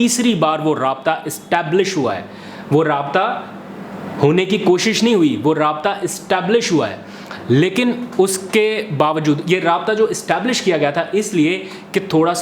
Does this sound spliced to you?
no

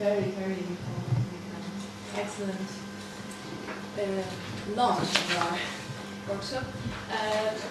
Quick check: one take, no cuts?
yes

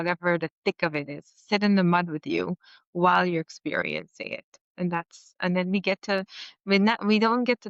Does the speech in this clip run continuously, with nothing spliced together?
yes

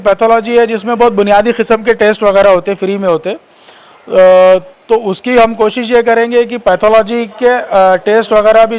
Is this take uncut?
yes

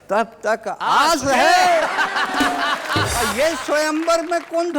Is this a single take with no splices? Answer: no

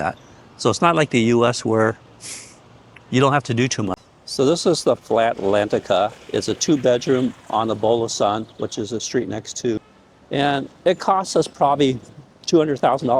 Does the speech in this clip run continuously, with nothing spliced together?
no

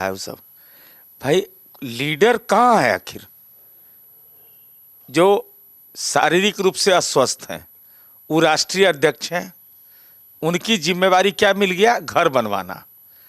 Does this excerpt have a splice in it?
no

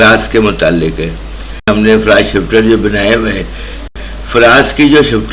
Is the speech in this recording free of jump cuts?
no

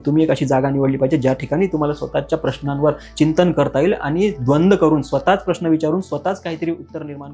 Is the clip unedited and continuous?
yes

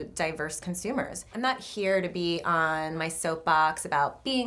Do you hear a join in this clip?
yes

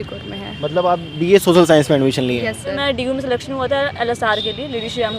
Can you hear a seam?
yes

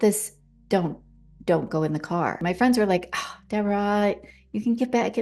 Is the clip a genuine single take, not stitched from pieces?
no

